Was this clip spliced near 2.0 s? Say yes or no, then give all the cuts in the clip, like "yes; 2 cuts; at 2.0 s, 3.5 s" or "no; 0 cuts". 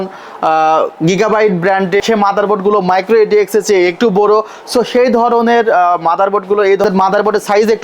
yes; 2 cuts; at 2.0 s, 6.8 s